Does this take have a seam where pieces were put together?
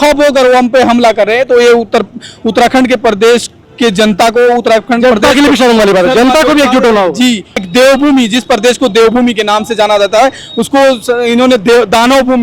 yes; 1 cut; at 7.6 s

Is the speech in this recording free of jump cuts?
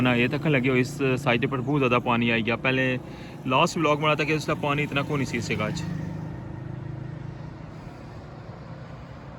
yes; 0 cuts

